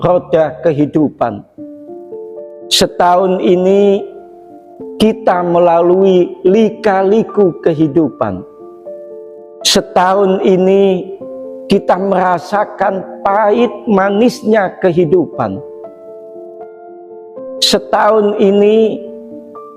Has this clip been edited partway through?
yes; 2 cuts; at 16.0 s, 17.7 s

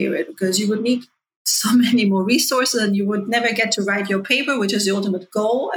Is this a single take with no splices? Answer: yes; 0 cuts

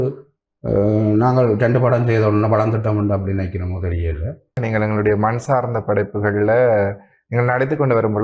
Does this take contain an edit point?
yes; 1 cut; at 4.6 s

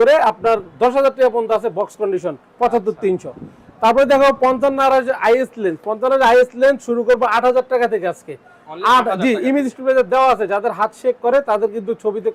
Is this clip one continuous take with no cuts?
yes; 0 cuts

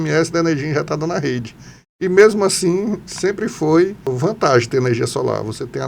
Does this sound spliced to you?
yes; 1 cut; at 4.1 s

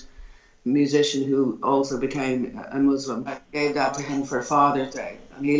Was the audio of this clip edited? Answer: yes; 1 cut; at 3.4 s

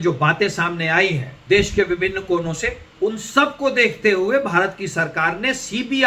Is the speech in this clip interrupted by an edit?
yes; 2 cuts; at 1.3 s, 2.8 s

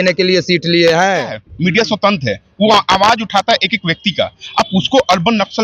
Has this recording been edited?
yes; 1 cut; at 1.4 s

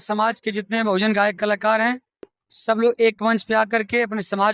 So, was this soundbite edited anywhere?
no; 0 cuts

